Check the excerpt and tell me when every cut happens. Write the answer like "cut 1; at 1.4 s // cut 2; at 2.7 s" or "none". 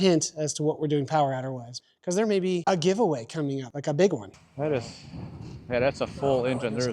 cut 1; at 1.7 s // cut 2; at 4.3 s